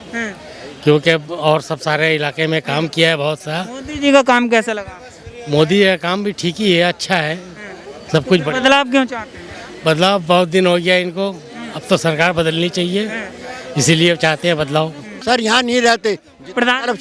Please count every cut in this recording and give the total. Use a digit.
1